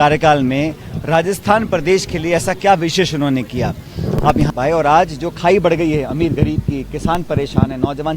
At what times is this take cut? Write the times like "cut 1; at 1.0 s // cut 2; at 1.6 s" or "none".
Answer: cut 1; at 4.5 s